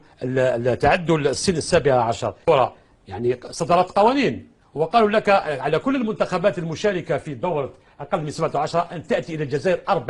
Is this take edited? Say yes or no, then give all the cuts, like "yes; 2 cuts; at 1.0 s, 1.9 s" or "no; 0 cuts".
yes; 1 cut; at 2.5 s